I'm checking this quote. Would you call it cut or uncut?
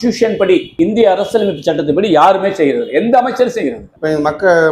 uncut